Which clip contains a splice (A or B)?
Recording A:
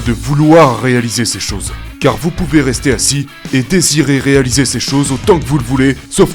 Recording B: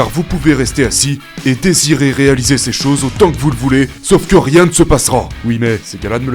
B